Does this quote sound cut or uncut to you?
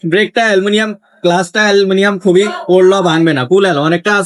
uncut